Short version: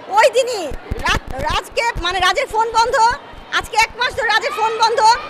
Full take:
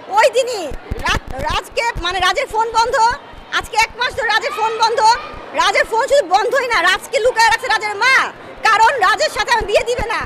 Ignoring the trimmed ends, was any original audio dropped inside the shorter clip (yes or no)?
no